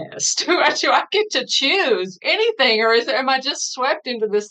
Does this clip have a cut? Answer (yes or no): yes